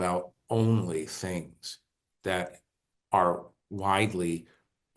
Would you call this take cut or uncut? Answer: uncut